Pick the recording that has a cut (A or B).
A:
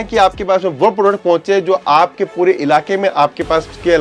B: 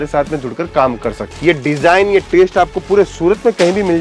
B